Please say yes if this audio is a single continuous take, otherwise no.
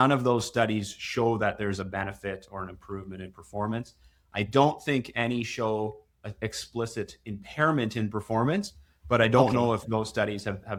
yes